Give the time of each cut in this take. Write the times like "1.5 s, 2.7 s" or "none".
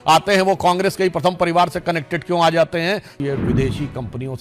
3.1 s